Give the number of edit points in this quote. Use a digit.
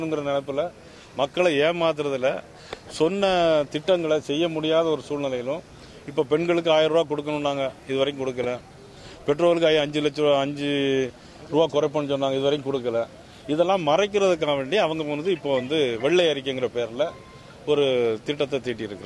0